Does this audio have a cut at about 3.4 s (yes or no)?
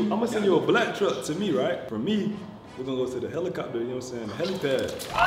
no